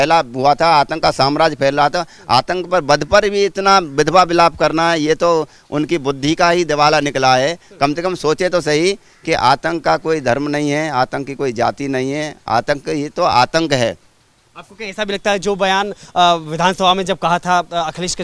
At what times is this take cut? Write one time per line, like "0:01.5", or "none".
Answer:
none

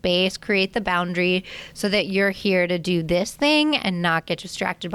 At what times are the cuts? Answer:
none

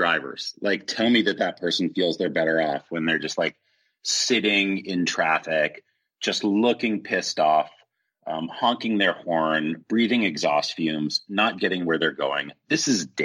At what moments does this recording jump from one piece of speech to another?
none

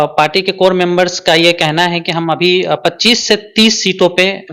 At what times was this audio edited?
none

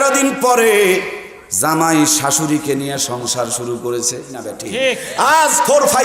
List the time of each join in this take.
0:04.6

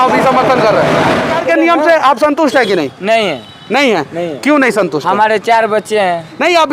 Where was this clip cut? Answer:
0:01.3

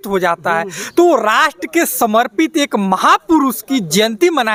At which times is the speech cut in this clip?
none

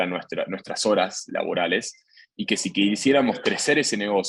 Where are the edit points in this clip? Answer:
none

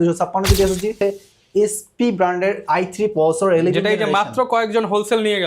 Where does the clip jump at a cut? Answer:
0:00.9

